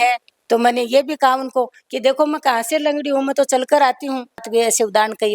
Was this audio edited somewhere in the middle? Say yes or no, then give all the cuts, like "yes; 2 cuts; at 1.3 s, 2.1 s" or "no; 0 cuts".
yes; 1 cut; at 4.4 s